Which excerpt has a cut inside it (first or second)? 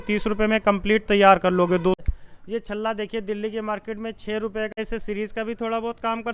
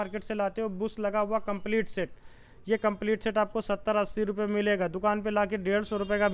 first